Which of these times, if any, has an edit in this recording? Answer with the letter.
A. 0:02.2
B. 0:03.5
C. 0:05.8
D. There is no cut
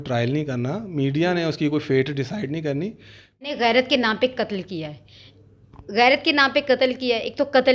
B